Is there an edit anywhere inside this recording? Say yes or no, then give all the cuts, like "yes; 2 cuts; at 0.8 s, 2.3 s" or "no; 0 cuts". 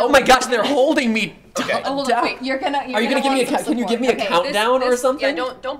no; 0 cuts